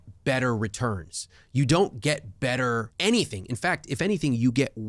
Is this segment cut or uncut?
cut